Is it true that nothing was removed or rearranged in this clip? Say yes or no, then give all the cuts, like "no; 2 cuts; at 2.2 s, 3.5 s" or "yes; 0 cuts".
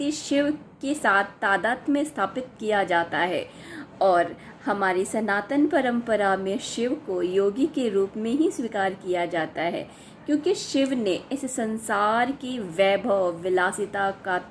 yes; 0 cuts